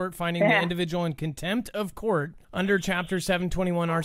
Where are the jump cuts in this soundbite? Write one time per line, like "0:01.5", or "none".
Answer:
0:02.4